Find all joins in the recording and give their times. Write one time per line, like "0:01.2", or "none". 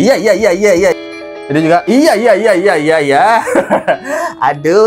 0:01.0